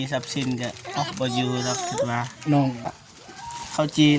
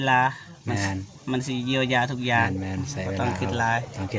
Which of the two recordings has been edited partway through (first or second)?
first